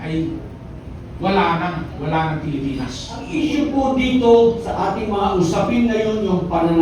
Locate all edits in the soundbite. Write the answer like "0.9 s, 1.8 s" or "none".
3.2 s